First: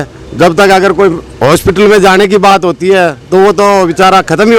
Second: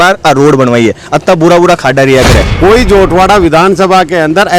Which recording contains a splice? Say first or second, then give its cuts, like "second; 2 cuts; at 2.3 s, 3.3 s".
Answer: second; 1 cut; at 2.4 s